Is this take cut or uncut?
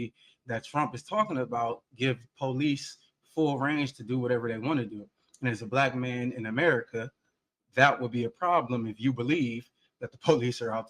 uncut